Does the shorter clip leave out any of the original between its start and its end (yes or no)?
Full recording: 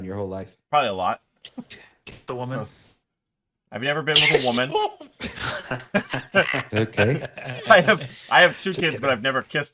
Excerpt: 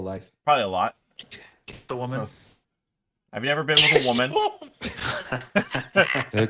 yes